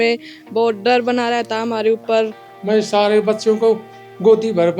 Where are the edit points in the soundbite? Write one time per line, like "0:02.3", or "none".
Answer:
0:02.5